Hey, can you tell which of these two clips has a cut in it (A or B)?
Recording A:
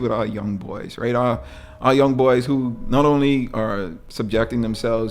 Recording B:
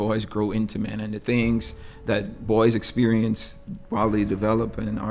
A